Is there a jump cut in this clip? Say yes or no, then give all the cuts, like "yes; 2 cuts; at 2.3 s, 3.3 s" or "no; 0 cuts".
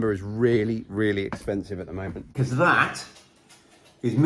yes; 1 cut; at 2.3 s